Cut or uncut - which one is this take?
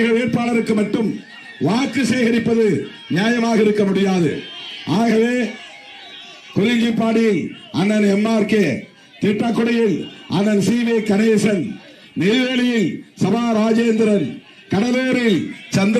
uncut